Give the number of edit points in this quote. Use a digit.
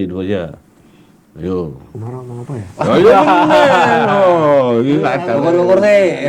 0